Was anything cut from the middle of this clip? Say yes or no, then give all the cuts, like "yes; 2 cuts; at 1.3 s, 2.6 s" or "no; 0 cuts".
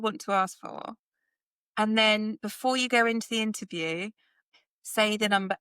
yes; 1 cut; at 4.4 s